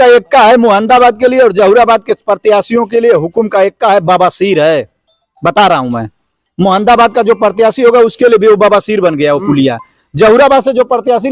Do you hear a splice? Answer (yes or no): no